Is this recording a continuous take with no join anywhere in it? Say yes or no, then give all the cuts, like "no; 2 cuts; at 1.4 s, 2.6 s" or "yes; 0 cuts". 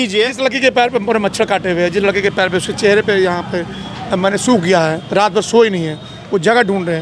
yes; 0 cuts